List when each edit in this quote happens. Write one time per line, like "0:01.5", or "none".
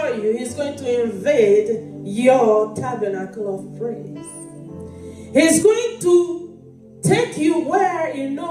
none